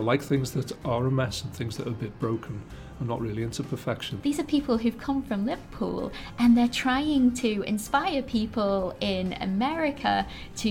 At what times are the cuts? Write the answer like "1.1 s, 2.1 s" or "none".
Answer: 4.1 s